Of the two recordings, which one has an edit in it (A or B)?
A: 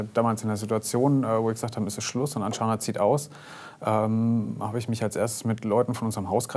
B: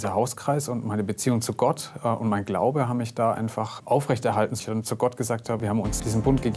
B